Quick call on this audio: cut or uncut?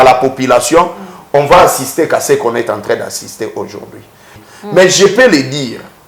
cut